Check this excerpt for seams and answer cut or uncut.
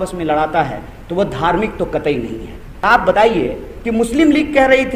cut